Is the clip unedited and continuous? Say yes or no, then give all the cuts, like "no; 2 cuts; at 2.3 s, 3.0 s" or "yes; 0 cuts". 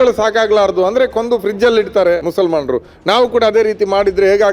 no; 1 cut; at 2.2 s